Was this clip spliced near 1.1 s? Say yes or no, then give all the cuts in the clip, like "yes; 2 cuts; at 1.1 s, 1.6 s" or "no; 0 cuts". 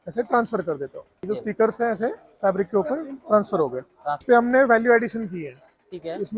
yes; 2 cuts; at 1.1 s, 4.2 s